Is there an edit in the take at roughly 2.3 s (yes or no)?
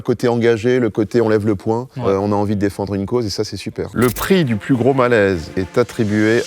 no